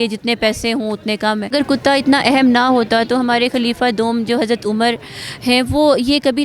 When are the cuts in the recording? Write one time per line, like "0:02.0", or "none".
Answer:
0:01.5